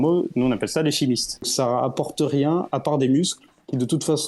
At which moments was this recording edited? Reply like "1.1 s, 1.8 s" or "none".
1.5 s